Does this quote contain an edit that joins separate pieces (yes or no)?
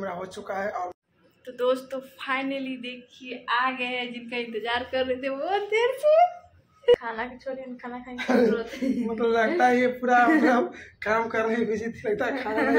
yes